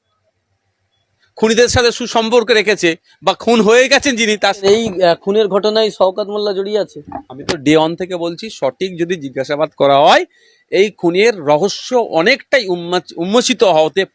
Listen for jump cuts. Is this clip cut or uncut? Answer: cut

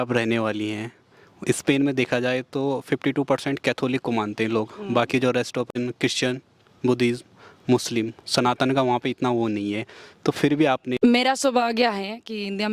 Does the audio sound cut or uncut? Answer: cut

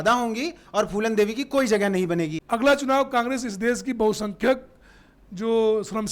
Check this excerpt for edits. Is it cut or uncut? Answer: cut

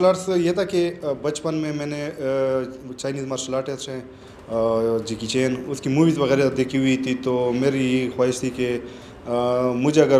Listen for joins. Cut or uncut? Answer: uncut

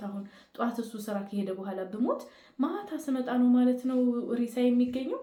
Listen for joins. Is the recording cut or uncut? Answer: uncut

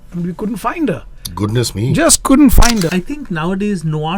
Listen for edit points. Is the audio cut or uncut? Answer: cut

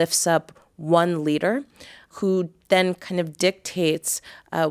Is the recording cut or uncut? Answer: cut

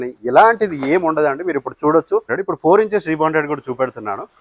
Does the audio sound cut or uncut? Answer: uncut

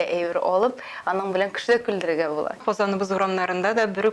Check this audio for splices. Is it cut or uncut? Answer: cut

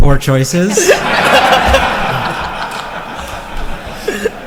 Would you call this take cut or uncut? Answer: uncut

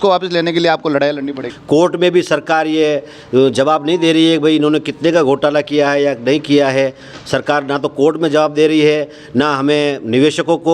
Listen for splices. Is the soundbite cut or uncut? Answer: cut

